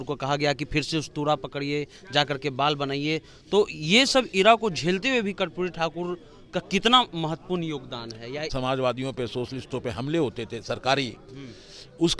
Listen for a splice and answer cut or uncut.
cut